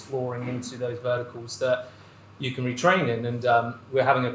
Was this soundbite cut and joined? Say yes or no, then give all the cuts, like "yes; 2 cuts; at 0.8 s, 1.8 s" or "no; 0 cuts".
no; 0 cuts